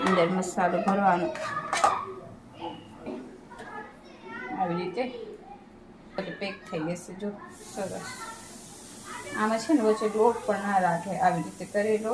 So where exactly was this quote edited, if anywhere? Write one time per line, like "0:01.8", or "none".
0:03.1
0:06.2